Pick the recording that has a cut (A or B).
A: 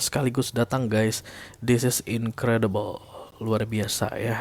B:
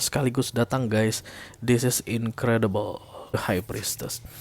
B